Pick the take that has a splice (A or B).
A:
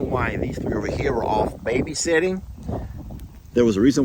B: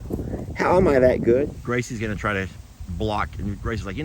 B